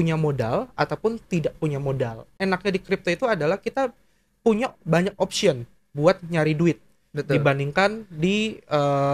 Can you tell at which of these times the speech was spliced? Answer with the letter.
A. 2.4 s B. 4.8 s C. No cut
A